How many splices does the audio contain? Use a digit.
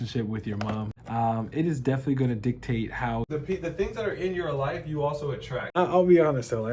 3